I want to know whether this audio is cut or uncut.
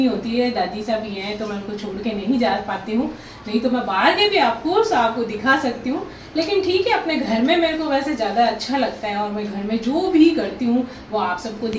uncut